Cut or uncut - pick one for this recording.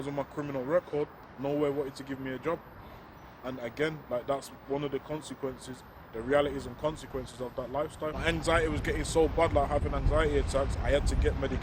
cut